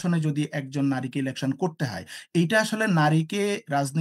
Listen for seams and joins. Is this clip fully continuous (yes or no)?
yes